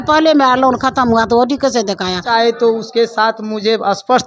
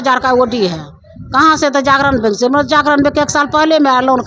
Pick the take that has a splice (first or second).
first